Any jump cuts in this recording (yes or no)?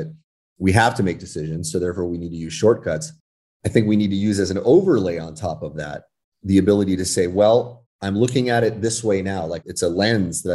no